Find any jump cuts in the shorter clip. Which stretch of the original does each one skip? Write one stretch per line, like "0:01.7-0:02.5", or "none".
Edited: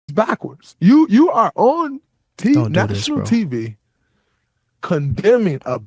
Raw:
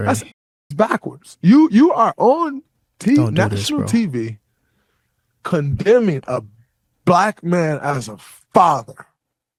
none

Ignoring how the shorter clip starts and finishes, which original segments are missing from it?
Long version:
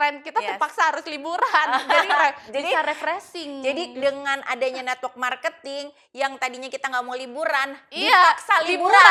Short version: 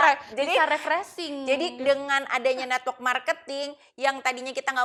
none

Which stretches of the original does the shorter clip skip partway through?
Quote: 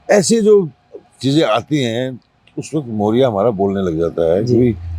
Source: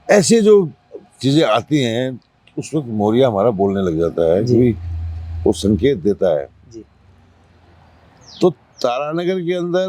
none

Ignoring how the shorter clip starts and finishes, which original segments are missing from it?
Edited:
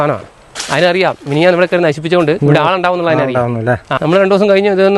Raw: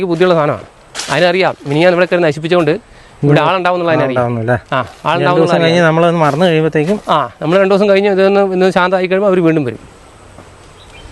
0:02.8-0:03.2
0:04.8-0:07.3

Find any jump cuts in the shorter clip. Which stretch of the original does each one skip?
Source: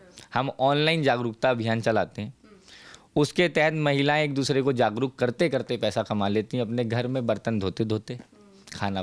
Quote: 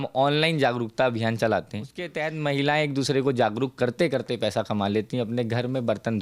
0:02.5-0:03.4

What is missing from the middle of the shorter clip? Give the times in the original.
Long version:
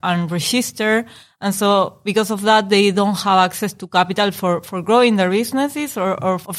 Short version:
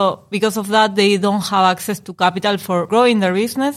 0:04.6-0:04.8

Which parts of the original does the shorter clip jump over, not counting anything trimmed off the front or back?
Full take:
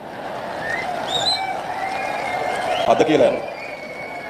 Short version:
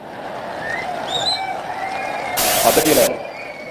0:02.4-0:02.6

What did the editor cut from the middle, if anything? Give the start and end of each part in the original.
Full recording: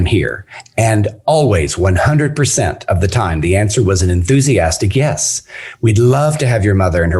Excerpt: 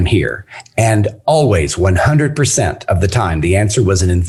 none

